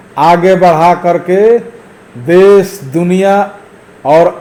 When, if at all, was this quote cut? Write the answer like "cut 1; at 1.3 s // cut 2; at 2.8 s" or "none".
none